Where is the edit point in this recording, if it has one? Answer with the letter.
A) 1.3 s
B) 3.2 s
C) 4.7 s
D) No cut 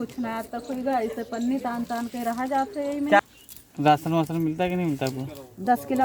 B